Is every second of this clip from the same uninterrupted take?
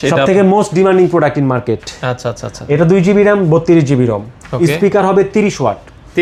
yes; 0 cuts

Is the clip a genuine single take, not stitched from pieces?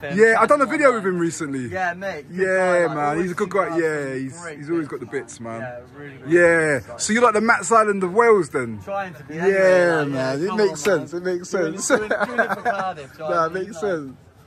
yes; 0 cuts

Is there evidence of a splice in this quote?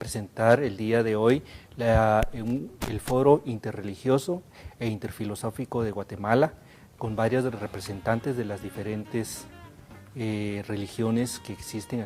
yes; 1 cut; at 9.5 s

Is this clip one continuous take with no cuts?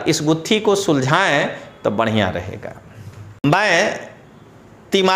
no; 1 cut; at 3.4 s

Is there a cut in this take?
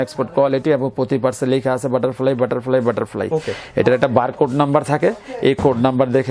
no; 0 cuts

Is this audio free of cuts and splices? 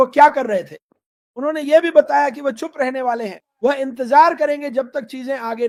yes; 0 cuts

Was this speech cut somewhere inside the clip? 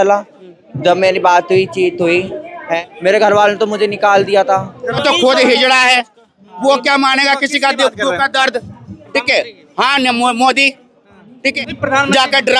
yes; 3 cuts; at 2.8 s, 5.0 s, 11.6 s

